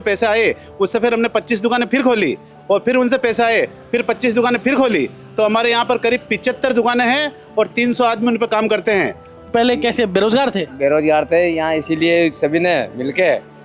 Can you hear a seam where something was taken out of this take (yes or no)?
yes